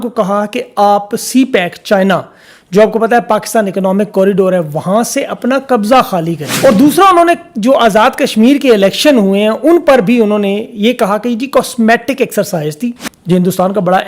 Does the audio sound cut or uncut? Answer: cut